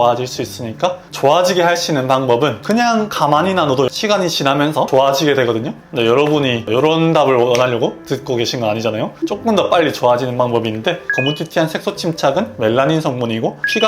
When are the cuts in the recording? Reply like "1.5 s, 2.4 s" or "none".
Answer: 1.0 s, 11.0 s

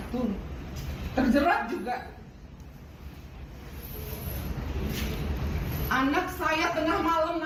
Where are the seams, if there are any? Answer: none

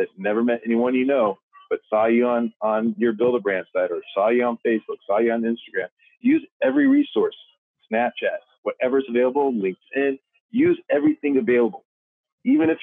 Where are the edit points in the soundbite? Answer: none

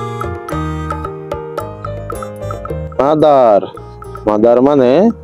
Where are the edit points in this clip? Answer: 2.9 s

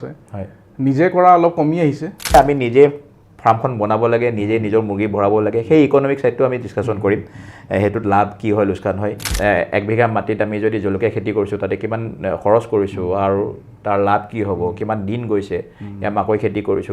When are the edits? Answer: 2.3 s, 9.2 s

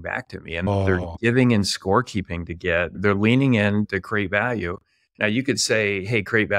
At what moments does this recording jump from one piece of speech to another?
0.7 s, 3.0 s, 3.9 s

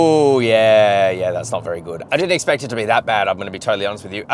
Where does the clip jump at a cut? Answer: 2.0 s

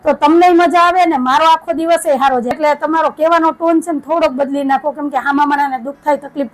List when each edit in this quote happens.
2.6 s

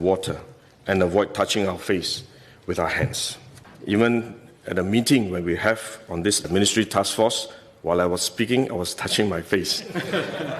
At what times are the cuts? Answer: 3.7 s

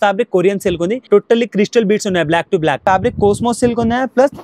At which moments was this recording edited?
1.0 s, 2.8 s

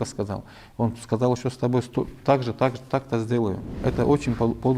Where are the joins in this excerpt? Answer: 3.8 s

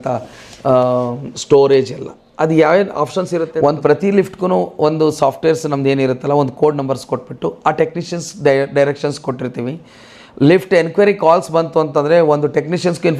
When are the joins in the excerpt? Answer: 3.4 s

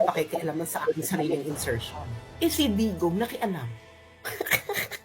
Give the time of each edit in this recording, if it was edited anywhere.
2.2 s

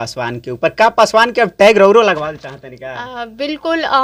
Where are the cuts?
none

